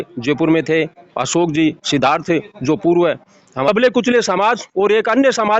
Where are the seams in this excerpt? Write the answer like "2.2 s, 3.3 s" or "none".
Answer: 3.7 s